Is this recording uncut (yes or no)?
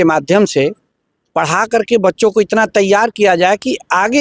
yes